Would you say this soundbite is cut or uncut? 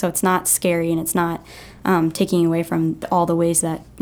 uncut